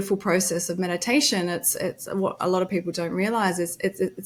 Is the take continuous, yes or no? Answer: yes